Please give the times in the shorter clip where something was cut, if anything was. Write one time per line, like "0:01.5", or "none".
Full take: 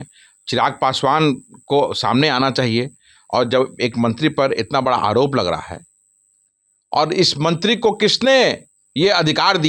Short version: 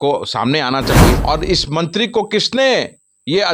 0:01.2